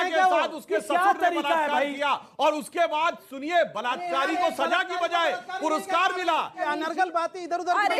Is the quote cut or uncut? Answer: cut